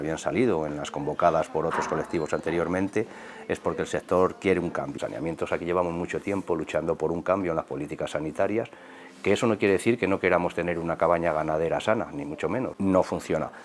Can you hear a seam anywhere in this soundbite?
yes; 2 cuts; at 4.9 s, 12.7 s

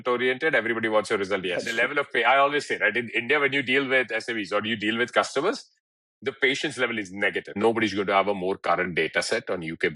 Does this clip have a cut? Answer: yes; 2 cuts; at 1.7 s, 7.6 s

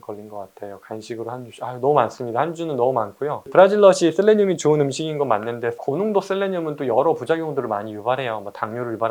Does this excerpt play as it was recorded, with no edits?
yes; 0 cuts

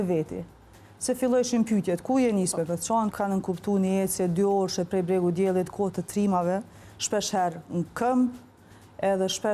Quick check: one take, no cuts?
no; 1 cut; at 3.1 s

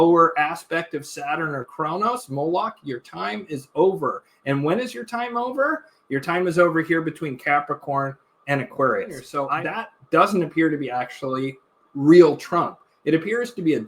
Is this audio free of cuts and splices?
no; 1 cut; at 9.3 s

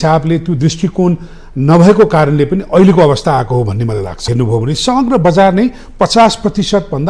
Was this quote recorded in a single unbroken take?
no; 1 cut; at 4.3 s

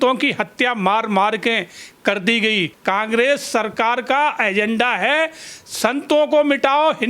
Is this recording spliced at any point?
yes; 1 cut; at 2.7 s

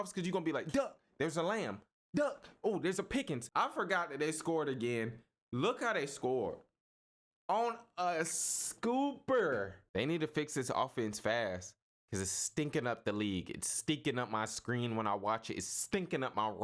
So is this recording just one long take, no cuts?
no; 2 cuts; at 3.4 s, 9.8 s

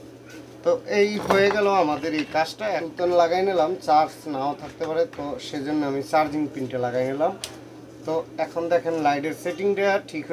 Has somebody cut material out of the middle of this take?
no; 0 cuts

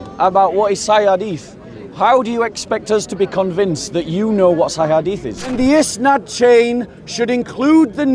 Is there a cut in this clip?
yes; 1 cut; at 5.5 s

